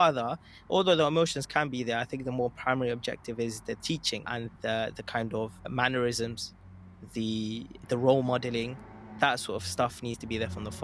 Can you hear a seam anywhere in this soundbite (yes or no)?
yes